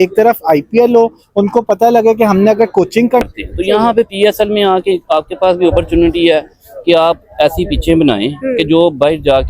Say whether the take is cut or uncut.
cut